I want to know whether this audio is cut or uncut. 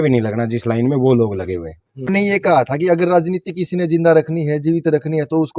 cut